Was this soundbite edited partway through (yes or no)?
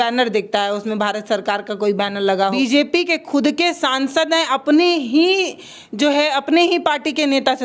yes